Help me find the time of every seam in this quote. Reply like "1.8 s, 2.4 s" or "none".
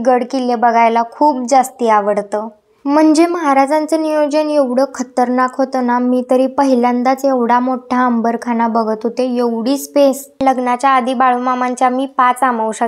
2.6 s, 10.4 s